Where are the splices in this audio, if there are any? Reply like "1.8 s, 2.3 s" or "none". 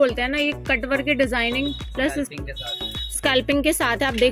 none